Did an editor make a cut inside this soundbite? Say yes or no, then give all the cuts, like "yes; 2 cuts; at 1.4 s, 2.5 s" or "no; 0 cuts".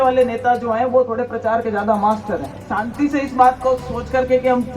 yes; 1 cut; at 3.0 s